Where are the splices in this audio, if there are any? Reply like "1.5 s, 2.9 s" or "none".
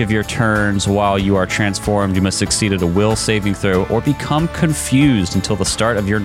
none